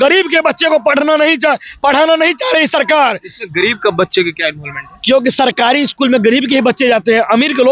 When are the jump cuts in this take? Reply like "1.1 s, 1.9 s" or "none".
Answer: none